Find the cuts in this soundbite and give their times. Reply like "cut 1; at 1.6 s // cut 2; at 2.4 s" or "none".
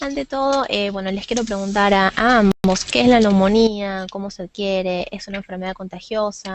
cut 1; at 3.6 s